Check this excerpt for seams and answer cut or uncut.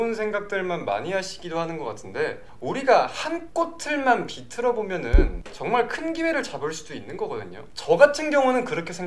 uncut